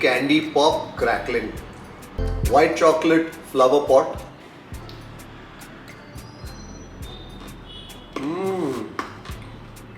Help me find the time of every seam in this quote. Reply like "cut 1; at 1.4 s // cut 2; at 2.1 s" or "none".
cut 1; at 2.3 s